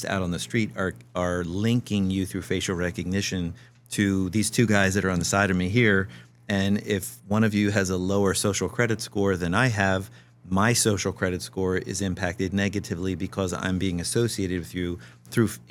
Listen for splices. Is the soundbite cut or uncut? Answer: uncut